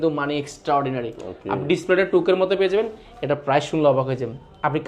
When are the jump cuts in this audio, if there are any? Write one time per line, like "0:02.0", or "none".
none